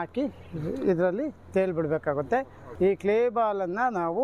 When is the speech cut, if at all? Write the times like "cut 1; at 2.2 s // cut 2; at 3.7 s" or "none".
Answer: cut 1; at 2.6 s